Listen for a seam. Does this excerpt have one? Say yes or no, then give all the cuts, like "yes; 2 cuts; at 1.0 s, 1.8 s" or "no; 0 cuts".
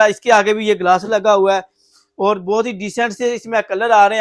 no; 0 cuts